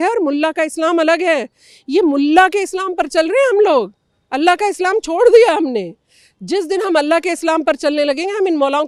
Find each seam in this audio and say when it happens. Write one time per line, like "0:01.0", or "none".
none